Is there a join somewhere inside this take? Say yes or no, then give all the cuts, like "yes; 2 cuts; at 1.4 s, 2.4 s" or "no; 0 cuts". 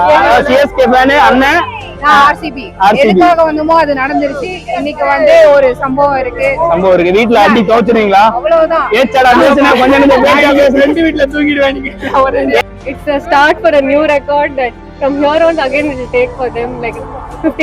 yes; 1 cut; at 12.6 s